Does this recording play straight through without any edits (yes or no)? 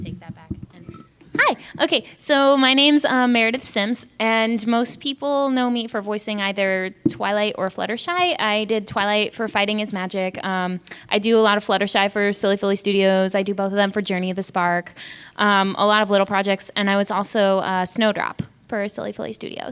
yes